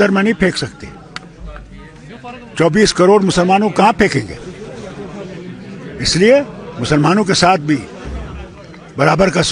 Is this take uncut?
yes; 0 cuts

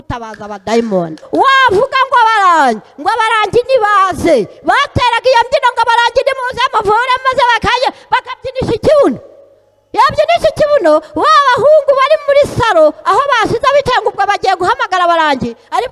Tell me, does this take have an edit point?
yes; 1 cut; at 1.2 s

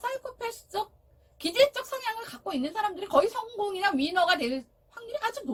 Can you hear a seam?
no; 0 cuts

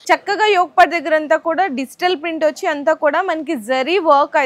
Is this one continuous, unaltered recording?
yes; 0 cuts

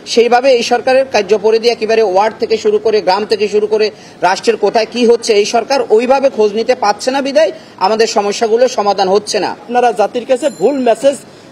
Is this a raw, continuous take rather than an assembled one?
no; 1 cut; at 9.7 s

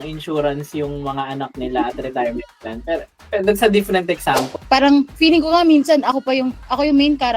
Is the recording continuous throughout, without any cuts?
no; 1 cut; at 4.5 s

